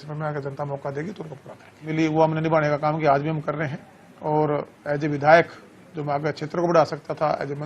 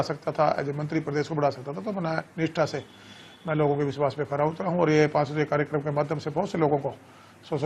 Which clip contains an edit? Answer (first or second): first